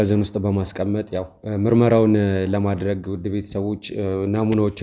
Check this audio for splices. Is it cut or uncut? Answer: uncut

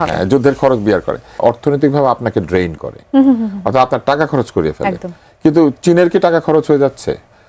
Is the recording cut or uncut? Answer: cut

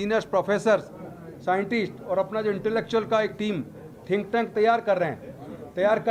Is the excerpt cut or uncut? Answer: uncut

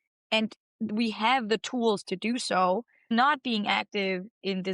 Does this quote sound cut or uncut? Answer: cut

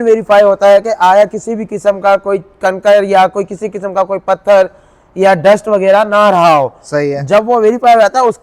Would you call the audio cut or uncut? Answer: uncut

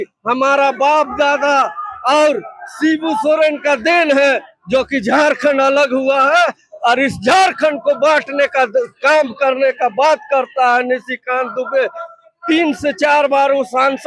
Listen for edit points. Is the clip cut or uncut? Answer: uncut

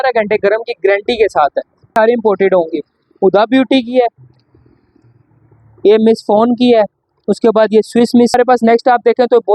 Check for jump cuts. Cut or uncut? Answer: cut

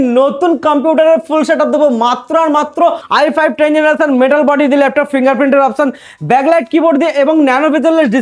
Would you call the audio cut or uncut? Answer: cut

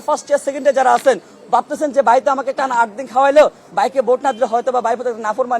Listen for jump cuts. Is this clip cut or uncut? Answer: uncut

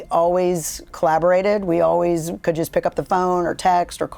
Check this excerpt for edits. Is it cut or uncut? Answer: uncut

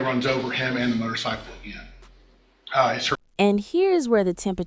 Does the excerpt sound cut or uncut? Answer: uncut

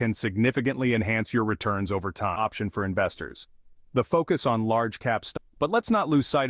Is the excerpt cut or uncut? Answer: cut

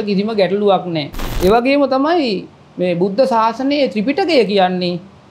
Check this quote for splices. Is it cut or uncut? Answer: cut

